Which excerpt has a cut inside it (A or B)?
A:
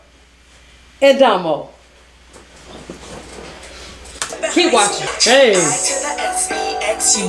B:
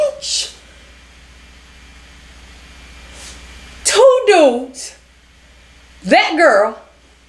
A